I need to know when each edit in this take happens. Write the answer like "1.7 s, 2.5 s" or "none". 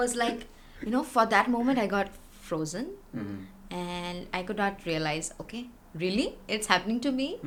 none